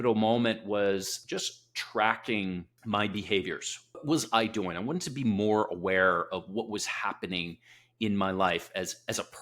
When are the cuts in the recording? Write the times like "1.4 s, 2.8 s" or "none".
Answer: 1.2 s, 2.7 s, 4.0 s